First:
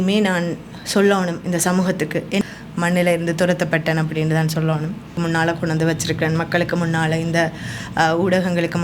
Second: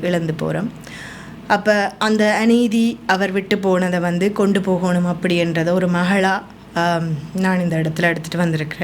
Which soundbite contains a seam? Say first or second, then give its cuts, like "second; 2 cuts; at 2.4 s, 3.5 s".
first; 2 cuts; at 2.4 s, 5.1 s